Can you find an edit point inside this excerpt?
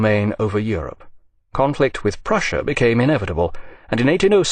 yes; 1 cut; at 3.0 s

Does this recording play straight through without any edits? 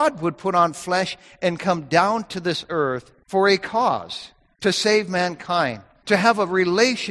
no; 2 cuts; at 3.1 s, 5.9 s

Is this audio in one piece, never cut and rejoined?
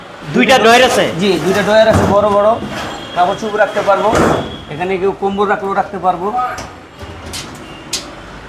yes; 0 cuts

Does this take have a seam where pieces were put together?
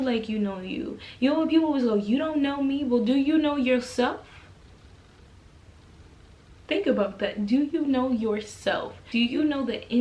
yes; 2 cuts; at 6.6 s, 9.0 s

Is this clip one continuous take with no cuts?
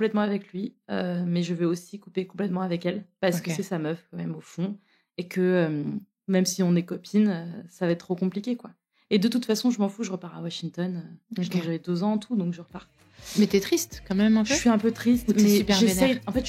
yes; 0 cuts

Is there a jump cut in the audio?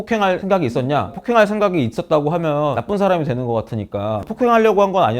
yes; 1 cut; at 1.1 s

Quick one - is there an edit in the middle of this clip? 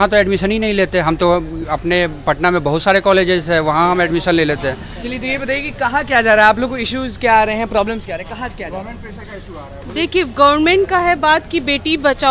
no; 0 cuts

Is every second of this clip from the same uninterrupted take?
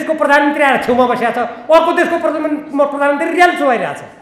yes; 0 cuts

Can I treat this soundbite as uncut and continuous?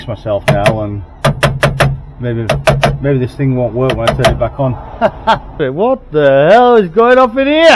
no; 1 cut; at 5.5 s

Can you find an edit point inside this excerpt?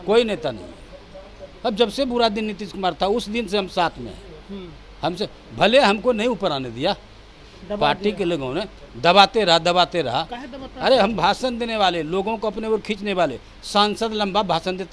no; 0 cuts

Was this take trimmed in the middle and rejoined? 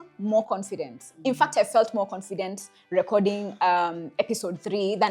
no; 0 cuts

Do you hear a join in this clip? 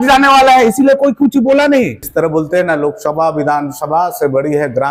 yes; 1 cut; at 2.0 s

